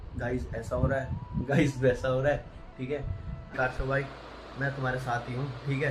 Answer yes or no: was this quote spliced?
yes